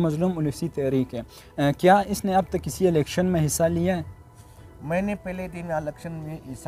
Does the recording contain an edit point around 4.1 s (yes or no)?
no